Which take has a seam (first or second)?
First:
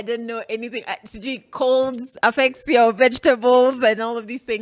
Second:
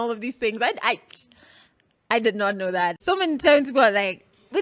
second